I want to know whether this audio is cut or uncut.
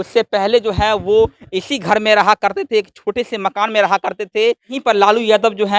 cut